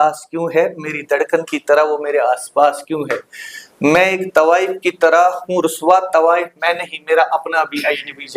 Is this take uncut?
yes; 0 cuts

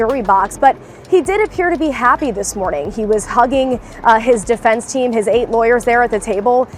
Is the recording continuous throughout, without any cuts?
yes; 0 cuts

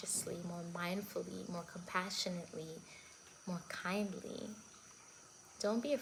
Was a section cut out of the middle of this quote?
no; 0 cuts

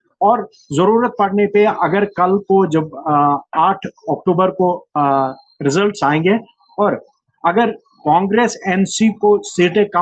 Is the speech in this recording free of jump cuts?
yes; 0 cuts

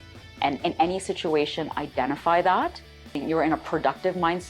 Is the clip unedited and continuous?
no; 1 cut; at 3.2 s

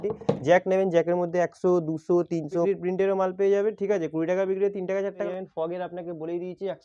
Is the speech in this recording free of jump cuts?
no; 2 cuts; at 2.7 s, 5.2 s

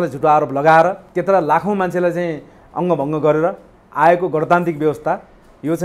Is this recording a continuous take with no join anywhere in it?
no; 1 cut; at 1.1 s

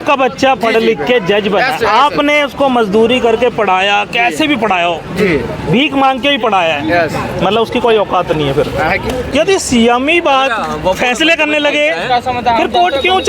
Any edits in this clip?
yes; 1 cut; at 9.3 s

